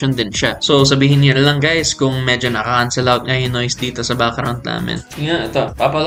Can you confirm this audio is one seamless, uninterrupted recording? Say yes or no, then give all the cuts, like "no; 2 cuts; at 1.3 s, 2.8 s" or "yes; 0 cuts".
yes; 0 cuts